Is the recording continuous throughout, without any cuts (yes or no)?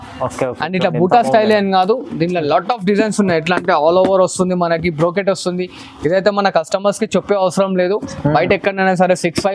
yes